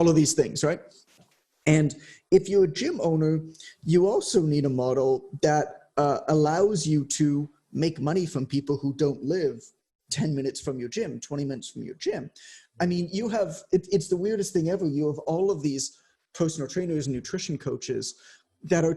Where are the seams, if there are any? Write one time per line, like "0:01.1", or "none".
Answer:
none